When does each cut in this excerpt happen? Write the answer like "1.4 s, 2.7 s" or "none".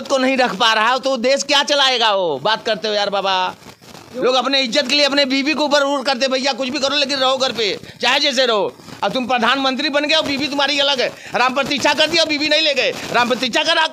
none